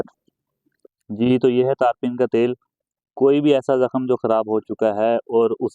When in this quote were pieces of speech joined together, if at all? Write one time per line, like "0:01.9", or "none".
0:01.0